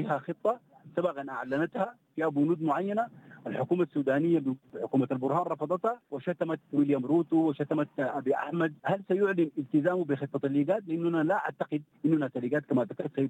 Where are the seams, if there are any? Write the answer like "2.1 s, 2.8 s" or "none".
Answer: 4.7 s, 6.1 s, 8.8 s, 11.8 s